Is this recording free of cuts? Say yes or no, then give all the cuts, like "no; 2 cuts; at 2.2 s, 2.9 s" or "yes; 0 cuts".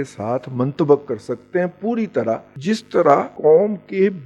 no; 1 cut; at 3.0 s